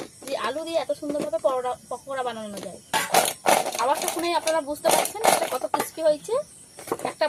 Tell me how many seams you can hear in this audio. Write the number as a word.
zero